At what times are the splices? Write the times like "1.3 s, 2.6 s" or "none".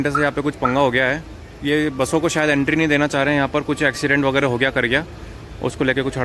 none